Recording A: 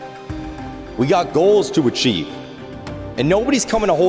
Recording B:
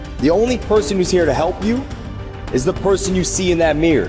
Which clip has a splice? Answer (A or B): A